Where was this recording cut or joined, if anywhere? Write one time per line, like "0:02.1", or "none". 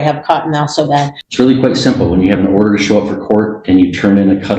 0:01.2